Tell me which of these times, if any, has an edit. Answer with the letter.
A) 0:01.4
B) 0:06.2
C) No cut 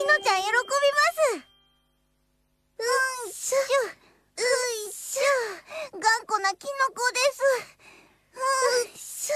C